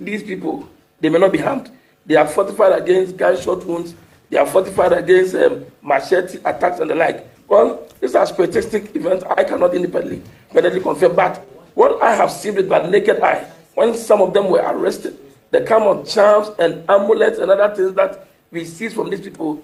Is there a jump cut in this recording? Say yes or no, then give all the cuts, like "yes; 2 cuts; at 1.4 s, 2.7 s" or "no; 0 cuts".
no; 0 cuts